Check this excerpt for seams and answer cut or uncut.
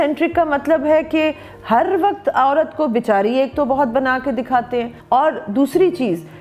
cut